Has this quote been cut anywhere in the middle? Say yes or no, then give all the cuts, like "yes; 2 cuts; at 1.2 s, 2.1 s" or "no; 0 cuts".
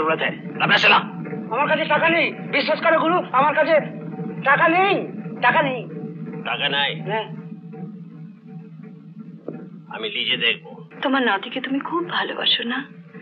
yes; 1 cut; at 10.9 s